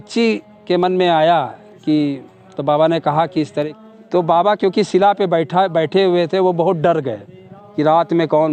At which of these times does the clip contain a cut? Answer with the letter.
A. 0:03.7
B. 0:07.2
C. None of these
A